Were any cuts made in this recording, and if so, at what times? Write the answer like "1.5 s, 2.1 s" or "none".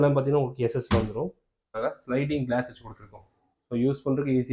1.7 s